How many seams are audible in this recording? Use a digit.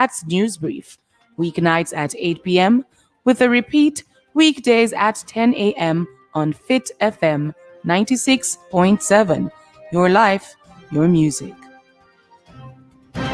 0